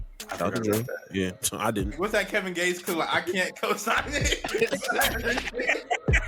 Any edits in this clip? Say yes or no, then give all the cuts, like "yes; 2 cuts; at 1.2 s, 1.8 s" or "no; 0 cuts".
yes; 1 cut; at 1.9 s